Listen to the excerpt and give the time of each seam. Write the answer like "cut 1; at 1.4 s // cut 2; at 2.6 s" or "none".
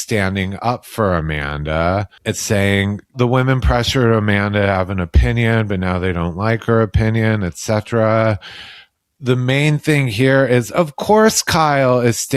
cut 1; at 2.1 s // cut 2; at 3.1 s

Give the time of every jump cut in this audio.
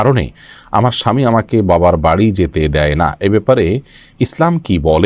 none

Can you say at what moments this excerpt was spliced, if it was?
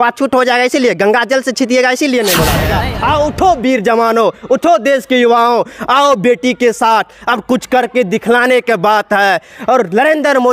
cut 1; at 2.8 s

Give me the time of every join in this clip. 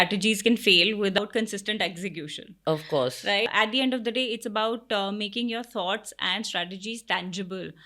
cut 1; at 1.2 s // cut 2; at 3.5 s

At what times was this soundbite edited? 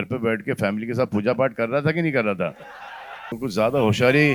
cut 1; at 3.4 s

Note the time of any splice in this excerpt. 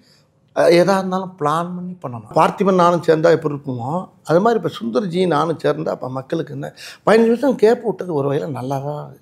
cut 1; at 2.3 s

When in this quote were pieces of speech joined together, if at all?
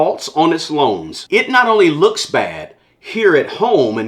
cut 1; at 1.1 s

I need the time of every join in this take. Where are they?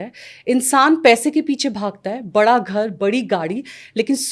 none

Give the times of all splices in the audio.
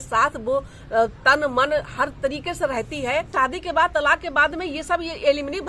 cut 1; at 3.3 s

